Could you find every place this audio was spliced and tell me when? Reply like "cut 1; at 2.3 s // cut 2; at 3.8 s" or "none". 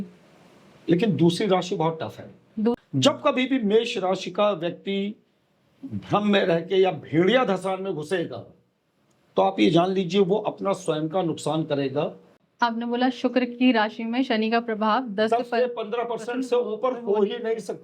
cut 1; at 2.7 s // cut 2; at 12.4 s